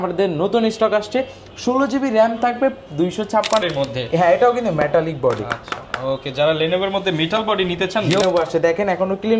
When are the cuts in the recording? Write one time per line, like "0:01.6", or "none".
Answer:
0:03.6
0:08.2